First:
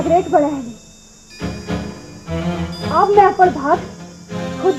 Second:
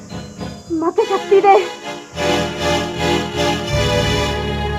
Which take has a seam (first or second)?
second